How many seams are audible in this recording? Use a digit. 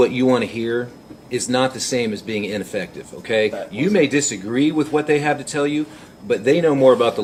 0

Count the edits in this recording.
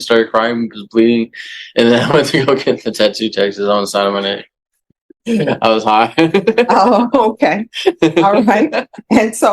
1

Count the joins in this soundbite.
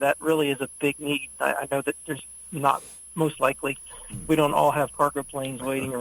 0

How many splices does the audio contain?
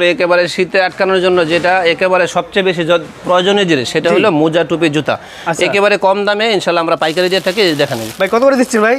0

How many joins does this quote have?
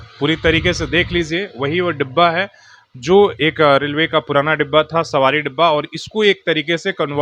0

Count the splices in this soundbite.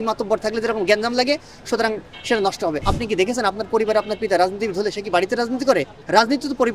2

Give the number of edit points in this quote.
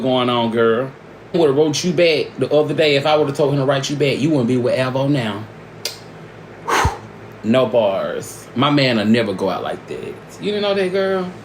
1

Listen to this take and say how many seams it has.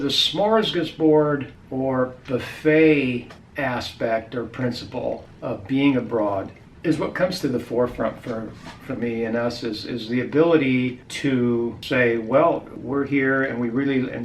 6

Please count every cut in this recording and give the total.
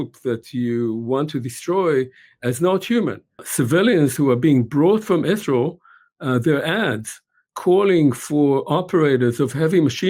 1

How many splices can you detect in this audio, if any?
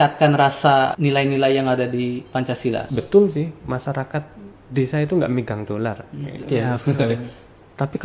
2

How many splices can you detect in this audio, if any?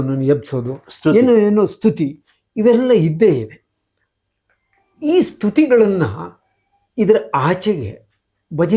0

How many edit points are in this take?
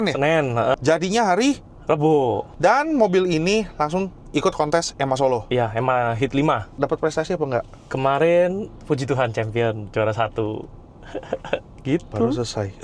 3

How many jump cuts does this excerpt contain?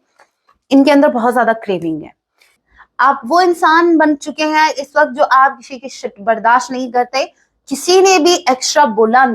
1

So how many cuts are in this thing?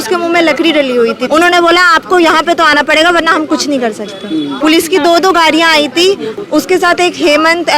3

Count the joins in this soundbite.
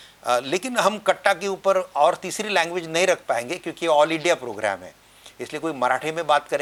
0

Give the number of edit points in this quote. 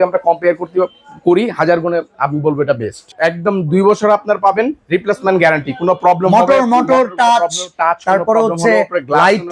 1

